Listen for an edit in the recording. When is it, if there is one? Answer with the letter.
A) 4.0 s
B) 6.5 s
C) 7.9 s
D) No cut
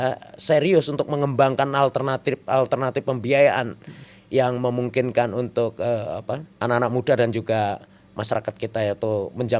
B